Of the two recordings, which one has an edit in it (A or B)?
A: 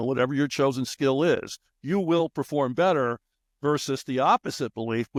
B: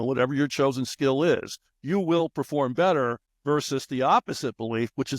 B